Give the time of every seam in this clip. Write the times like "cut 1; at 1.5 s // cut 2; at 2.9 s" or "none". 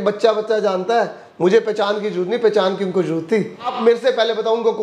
cut 1; at 3.7 s

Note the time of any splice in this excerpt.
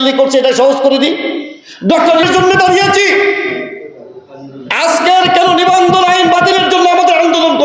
cut 1; at 2.2 s

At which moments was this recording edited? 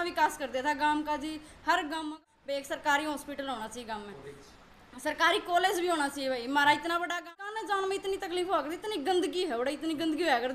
cut 1; at 2.2 s // cut 2; at 7.3 s

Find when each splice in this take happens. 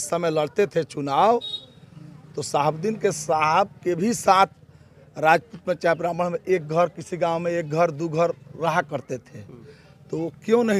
none

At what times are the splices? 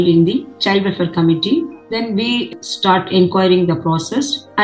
none

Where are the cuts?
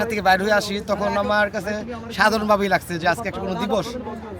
none

